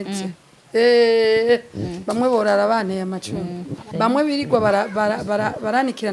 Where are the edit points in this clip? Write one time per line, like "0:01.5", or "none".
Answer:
0:03.8

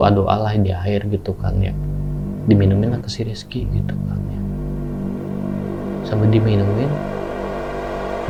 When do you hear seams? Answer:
none

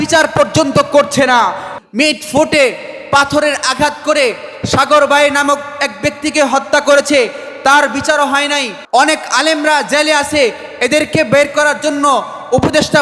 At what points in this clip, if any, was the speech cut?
0:01.7
0:08.8

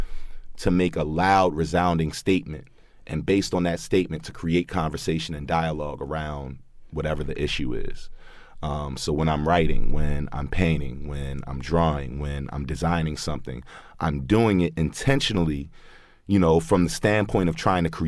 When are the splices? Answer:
none

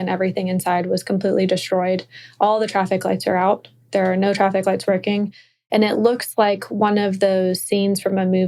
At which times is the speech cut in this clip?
none

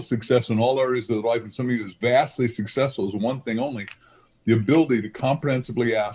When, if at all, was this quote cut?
none

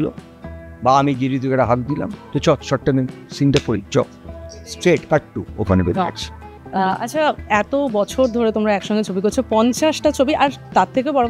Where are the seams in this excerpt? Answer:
none

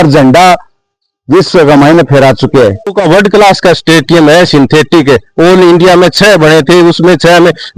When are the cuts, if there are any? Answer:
0:03.0

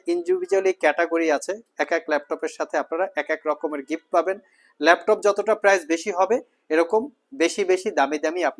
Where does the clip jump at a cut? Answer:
none

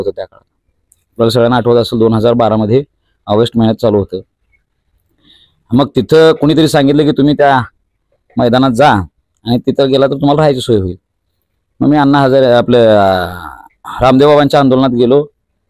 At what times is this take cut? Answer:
none

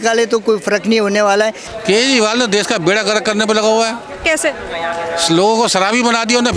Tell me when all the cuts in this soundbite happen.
0:01.7

